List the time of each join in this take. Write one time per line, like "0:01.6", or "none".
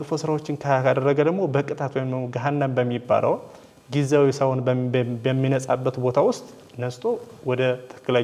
none

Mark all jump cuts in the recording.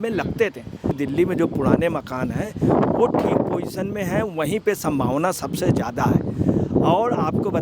0:00.9

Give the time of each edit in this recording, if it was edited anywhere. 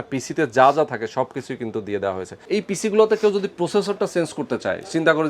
0:02.3

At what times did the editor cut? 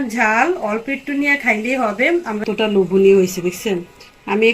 0:02.4

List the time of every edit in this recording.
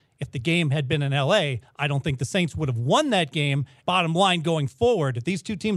0:03.7

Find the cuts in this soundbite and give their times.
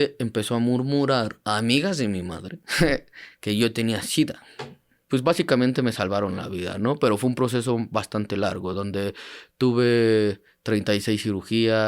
0:05.0

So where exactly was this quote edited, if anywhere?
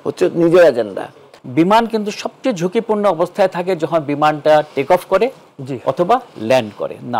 0:01.3

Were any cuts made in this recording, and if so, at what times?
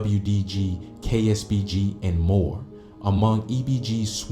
0:01.7

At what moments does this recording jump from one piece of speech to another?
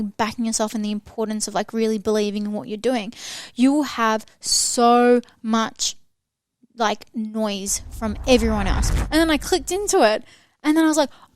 0:08.8

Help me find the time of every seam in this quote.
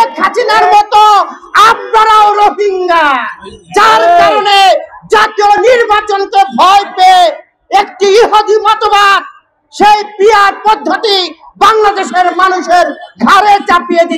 none

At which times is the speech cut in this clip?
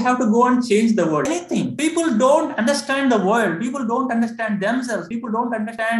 0:01.3

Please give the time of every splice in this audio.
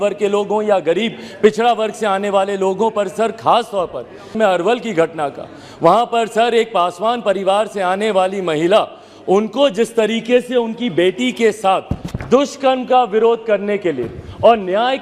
0:04.3

